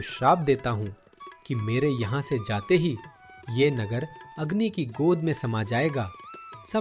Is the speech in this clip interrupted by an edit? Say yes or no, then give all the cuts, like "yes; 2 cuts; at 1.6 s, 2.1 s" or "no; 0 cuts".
no; 0 cuts